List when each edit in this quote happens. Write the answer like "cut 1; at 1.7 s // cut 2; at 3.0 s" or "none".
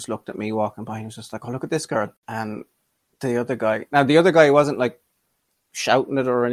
cut 1; at 2.2 s